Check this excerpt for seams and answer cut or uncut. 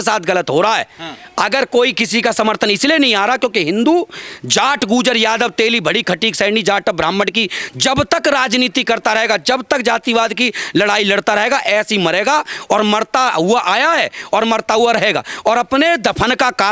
uncut